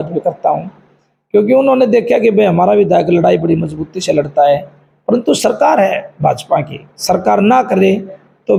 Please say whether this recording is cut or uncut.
uncut